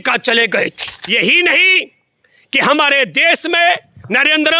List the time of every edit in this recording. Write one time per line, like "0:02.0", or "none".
0:00.9